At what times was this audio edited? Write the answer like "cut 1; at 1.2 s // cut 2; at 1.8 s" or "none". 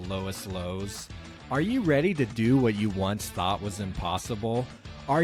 none